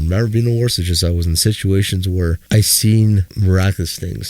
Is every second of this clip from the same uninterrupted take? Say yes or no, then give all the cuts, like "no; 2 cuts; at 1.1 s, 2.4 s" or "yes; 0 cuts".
no; 2 cuts; at 2.4 s, 3.3 s